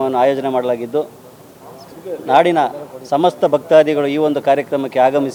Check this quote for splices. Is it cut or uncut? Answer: uncut